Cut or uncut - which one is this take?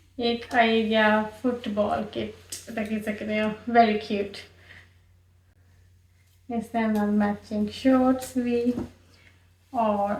uncut